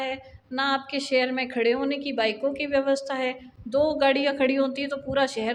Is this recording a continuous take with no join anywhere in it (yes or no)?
yes